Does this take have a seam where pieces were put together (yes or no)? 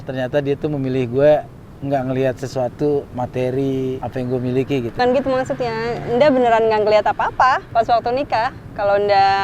yes